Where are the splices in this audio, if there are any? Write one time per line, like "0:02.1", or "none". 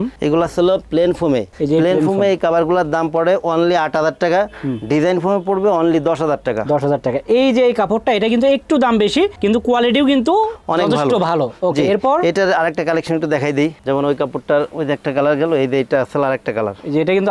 none